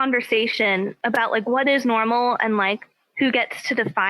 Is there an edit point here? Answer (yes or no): yes